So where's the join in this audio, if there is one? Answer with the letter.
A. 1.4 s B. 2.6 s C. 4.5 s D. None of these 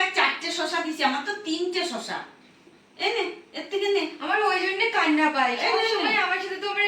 B